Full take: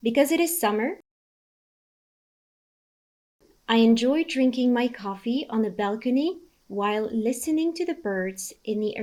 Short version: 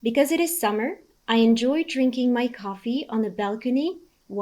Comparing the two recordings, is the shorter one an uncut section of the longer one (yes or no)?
no